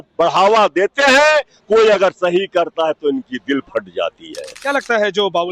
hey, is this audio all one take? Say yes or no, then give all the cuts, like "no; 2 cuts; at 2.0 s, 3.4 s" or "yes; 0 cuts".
no; 1 cut; at 4.6 s